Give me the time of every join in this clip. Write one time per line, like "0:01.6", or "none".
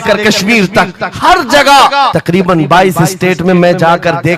0:02.2